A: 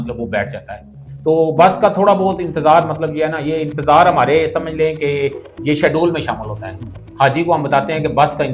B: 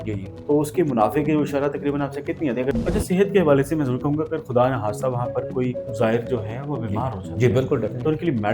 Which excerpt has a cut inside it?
B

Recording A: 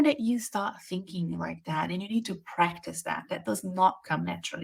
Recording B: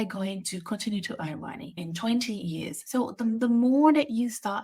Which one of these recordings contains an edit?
B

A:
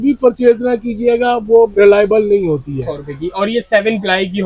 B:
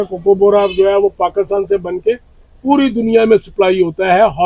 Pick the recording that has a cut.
A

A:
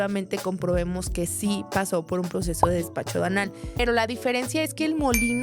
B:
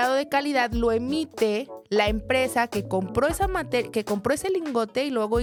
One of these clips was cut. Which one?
A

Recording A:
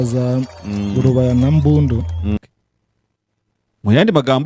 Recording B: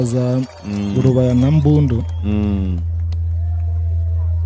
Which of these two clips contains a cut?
A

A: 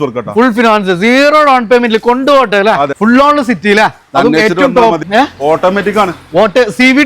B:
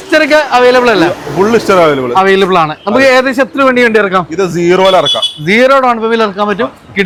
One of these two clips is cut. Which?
A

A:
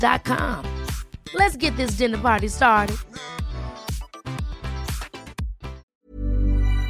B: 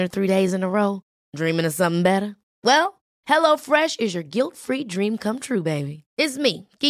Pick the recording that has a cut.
A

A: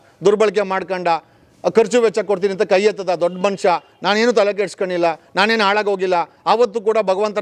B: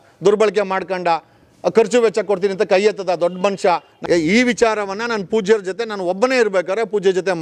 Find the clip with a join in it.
B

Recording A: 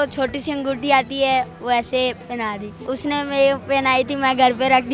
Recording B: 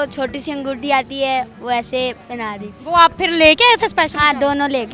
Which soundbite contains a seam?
A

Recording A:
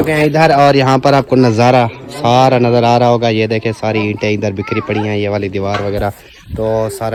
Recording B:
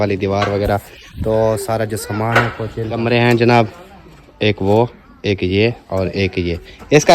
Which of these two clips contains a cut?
B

